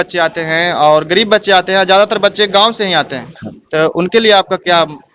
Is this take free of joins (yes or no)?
yes